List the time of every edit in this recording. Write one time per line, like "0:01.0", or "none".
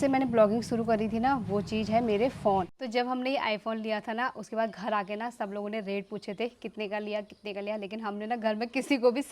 0:02.8